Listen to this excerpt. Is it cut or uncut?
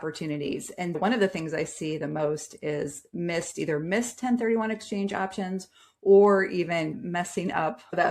uncut